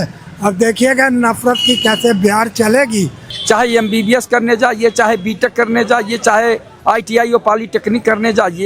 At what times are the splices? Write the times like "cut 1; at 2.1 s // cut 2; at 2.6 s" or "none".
cut 1; at 3.3 s